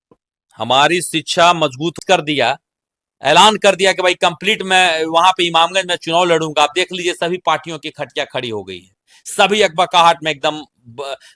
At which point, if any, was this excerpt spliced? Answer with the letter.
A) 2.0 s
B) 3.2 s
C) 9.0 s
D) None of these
A